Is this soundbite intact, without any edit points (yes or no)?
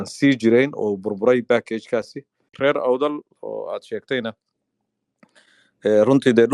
no